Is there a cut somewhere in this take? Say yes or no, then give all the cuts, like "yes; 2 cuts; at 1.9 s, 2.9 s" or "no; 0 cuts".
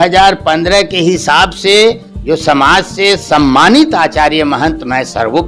no; 0 cuts